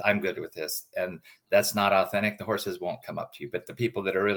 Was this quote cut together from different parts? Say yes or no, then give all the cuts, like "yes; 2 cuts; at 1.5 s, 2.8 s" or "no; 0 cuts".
no; 0 cuts